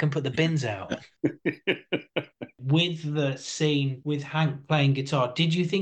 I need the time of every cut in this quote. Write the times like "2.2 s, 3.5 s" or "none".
1.1 s, 2.5 s, 4.0 s